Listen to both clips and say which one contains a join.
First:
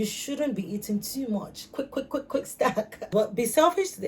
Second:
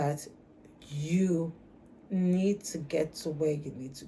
first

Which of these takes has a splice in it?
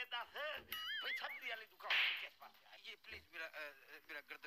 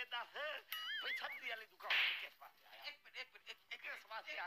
first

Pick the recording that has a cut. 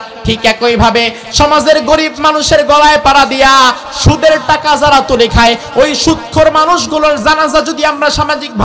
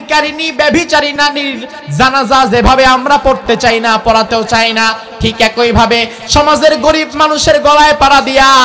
second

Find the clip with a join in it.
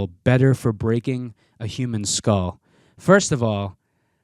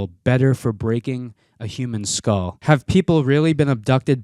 second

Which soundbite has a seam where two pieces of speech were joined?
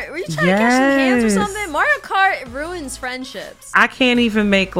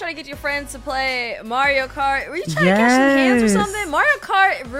first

